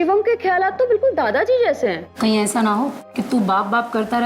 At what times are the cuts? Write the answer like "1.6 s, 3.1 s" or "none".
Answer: 2.1 s